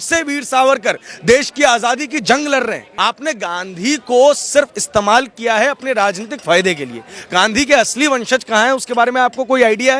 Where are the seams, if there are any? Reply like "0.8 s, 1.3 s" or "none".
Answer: 2.8 s